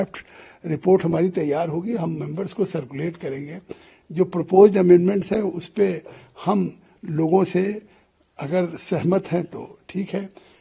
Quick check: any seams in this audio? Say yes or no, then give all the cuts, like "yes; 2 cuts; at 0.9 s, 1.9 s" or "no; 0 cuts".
no; 0 cuts